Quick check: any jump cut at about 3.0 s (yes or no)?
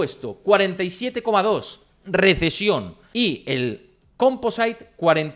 yes